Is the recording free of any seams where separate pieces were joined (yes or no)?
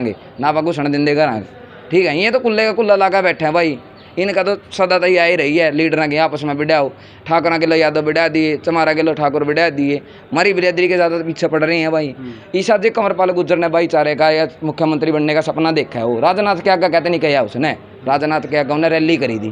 yes